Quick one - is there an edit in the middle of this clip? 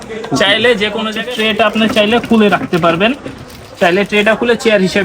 yes; 1 cut; at 1.1 s

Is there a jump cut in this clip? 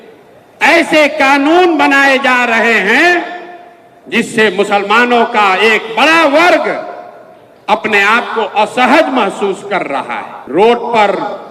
yes; 1 cut; at 10.3 s

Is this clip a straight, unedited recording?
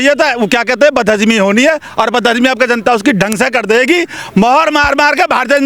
yes; 0 cuts

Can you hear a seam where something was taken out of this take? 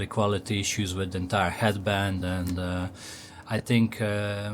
no; 0 cuts

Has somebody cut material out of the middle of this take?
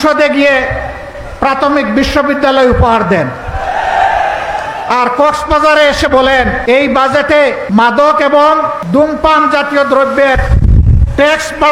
yes; 3 cuts; at 6.6 s, 7.6 s, 8.8 s

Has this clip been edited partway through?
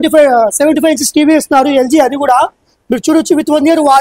no; 0 cuts

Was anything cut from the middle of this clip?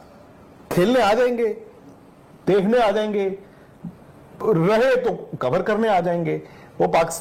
no; 0 cuts

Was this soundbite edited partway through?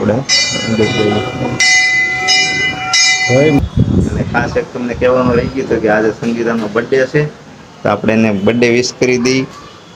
yes; 1 cut; at 3.6 s

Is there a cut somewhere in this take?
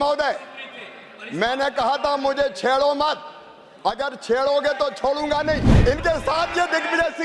yes; 1 cut; at 5.7 s

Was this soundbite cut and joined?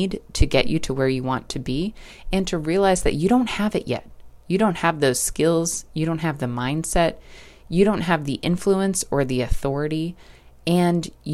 no; 0 cuts

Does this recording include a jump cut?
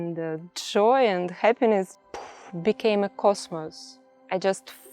yes; 1 cut; at 1.9 s

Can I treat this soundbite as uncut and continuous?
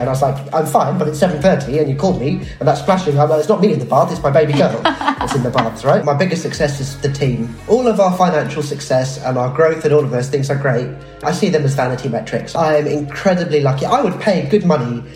no; 3 cuts; at 6.0 s, 7.6 s, 11.2 s

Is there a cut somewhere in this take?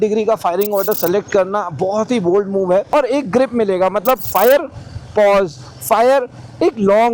yes; 2 cuts; at 2.9 s, 4.2 s

